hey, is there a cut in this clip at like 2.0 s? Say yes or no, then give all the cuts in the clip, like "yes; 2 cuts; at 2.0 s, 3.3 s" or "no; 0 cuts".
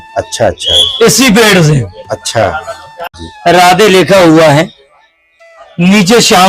no; 1 cut; at 3.2 s